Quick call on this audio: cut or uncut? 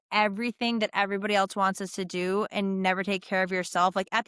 uncut